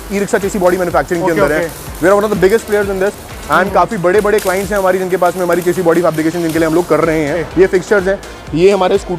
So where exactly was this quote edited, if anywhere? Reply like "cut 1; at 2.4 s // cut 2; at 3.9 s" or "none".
cut 1; at 7.5 s